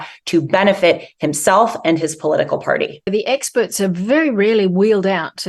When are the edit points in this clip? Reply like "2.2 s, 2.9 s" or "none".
3.1 s